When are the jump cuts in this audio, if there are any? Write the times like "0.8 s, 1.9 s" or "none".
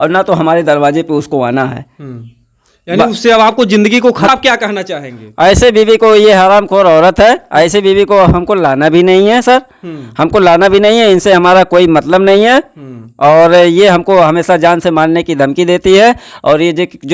4.3 s